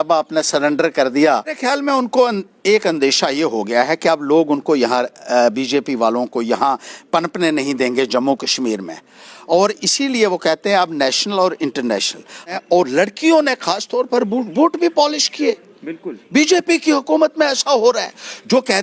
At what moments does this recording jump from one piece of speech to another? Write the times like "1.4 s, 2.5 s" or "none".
1.6 s, 12.6 s